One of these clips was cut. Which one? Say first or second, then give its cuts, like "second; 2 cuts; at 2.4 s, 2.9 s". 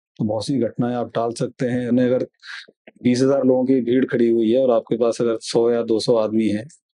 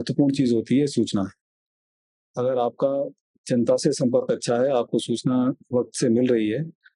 first; 1 cut; at 1.9 s